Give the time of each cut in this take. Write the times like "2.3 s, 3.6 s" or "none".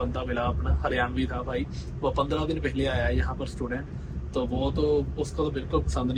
none